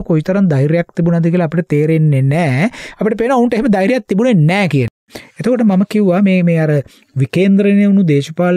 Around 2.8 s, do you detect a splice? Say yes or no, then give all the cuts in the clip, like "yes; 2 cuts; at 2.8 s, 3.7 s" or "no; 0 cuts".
no; 1 cut; at 5.0 s